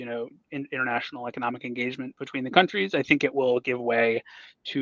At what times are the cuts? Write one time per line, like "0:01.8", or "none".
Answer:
none

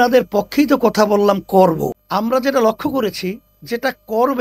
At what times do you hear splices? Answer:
0:02.0

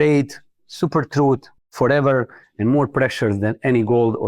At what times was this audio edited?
0:01.6

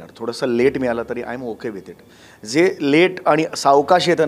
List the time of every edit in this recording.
none

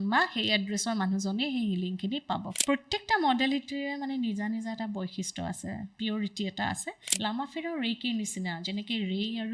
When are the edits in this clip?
0:02.5
0:07.0

